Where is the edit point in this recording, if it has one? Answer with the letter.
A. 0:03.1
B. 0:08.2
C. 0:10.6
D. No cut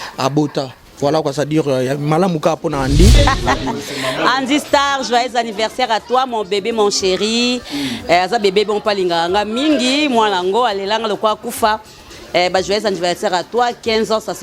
A